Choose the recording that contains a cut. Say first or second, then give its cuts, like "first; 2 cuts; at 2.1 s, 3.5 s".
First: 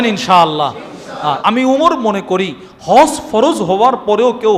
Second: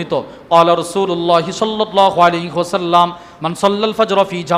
first; 1 cut; at 1.4 s